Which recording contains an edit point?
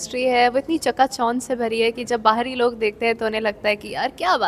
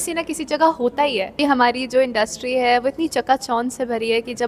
second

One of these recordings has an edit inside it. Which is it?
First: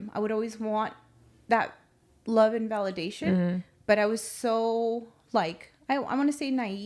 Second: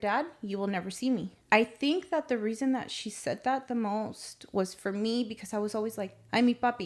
second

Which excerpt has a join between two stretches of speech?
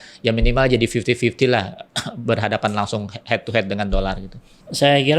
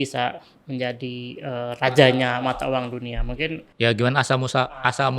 second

